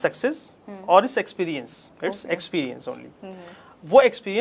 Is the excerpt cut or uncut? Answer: uncut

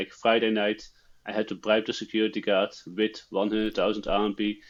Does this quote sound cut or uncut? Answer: uncut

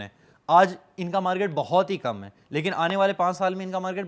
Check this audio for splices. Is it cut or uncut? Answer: uncut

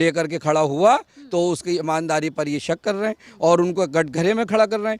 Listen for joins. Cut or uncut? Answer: uncut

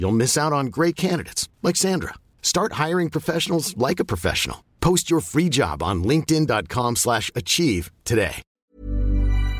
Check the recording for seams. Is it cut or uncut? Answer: cut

